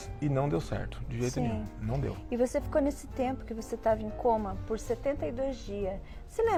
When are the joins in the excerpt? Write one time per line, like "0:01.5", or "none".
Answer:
none